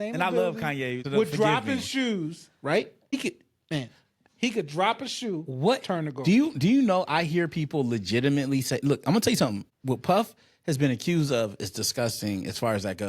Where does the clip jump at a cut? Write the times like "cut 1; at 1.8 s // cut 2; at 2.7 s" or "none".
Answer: cut 1; at 1.0 s // cut 2; at 3.1 s // cut 3; at 9.7 s